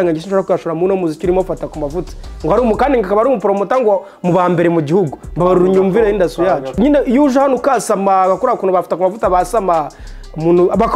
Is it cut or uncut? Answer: cut